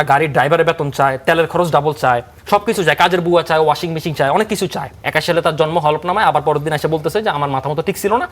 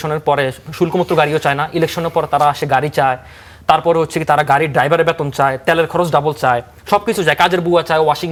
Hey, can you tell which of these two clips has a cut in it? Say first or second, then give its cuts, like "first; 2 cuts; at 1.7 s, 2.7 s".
first; 1 cut; at 5.0 s